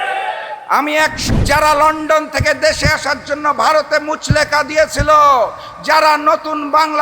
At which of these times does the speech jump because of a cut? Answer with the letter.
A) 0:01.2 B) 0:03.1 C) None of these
A